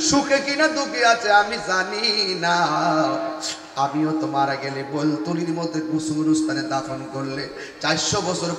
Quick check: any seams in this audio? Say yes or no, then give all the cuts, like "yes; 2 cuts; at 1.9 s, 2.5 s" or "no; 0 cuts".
no; 0 cuts